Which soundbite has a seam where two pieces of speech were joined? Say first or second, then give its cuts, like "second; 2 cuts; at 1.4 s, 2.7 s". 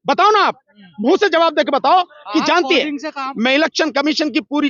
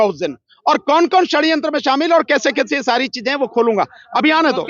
first; 1 cut; at 3.2 s